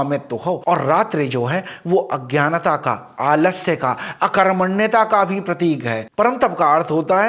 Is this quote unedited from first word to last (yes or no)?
no